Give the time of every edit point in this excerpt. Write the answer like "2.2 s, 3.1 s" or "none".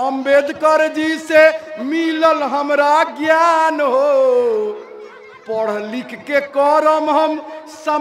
none